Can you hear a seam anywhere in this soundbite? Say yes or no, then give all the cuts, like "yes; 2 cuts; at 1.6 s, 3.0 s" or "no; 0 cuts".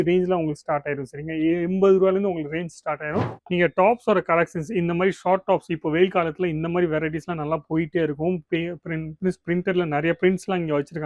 yes; 1 cut; at 3.4 s